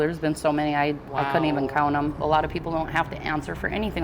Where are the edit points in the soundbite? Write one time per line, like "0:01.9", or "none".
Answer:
0:02.2